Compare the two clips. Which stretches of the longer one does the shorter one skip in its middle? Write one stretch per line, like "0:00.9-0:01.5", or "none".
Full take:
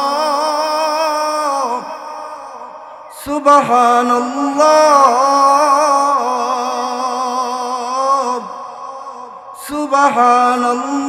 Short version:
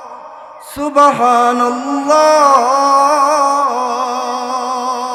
none